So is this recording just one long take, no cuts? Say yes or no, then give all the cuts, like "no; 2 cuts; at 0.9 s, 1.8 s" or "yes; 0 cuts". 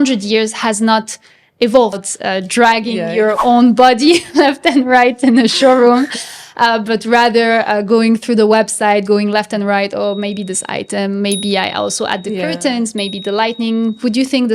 no; 1 cut; at 2.0 s